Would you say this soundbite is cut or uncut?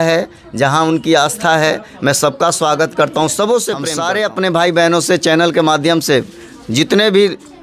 cut